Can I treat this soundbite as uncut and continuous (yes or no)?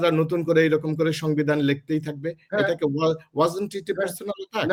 yes